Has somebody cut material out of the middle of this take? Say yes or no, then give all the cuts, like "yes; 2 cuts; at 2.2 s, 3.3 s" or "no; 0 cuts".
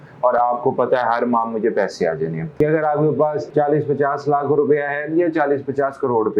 yes; 1 cut; at 2.5 s